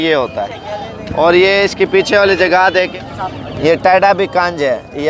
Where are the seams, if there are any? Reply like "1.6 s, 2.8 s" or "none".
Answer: 2.9 s